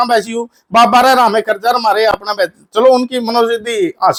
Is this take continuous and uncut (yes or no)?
yes